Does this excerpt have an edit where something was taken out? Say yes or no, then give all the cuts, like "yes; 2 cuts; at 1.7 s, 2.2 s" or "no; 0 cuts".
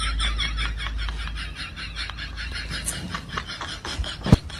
no; 0 cuts